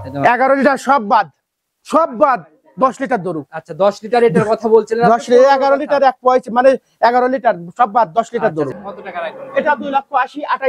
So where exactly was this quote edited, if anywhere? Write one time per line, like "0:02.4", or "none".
0:08.8